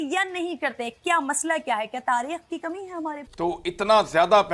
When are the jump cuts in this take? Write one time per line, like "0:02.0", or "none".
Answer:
0:03.2